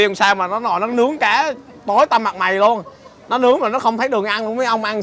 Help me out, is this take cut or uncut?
uncut